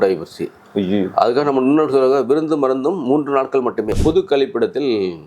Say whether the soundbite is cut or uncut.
cut